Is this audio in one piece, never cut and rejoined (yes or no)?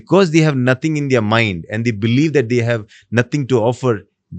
yes